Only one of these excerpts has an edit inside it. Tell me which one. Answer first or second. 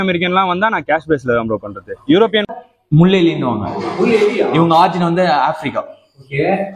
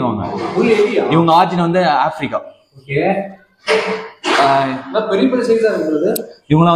first